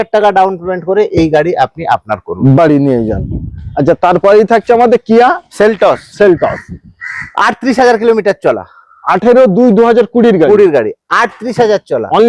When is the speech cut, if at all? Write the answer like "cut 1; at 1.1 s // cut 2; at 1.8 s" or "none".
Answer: none